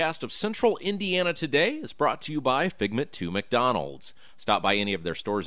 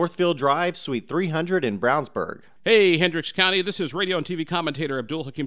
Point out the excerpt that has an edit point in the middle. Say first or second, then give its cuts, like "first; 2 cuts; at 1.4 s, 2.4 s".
second; 1 cut; at 2.4 s